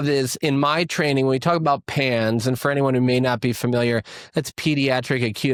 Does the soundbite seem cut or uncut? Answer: uncut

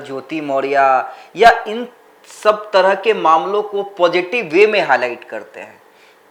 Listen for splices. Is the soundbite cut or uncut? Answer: uncut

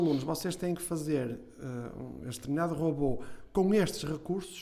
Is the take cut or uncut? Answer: uncut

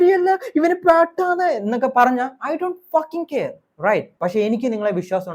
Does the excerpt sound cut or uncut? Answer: uncut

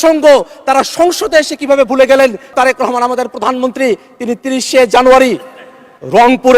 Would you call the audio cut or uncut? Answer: cut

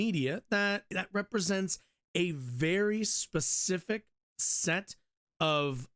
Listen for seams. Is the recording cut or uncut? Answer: cut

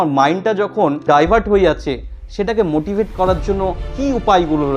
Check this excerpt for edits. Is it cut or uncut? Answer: cut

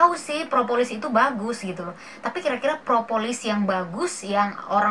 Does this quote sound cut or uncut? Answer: uncut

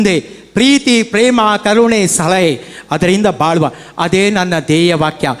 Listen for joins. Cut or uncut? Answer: uncut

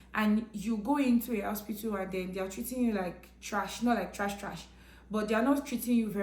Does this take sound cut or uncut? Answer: uncut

